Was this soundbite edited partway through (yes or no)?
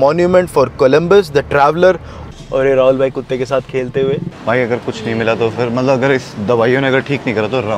yes